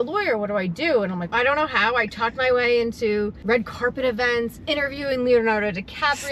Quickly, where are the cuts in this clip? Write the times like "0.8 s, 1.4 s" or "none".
1.3 s, 3.4 s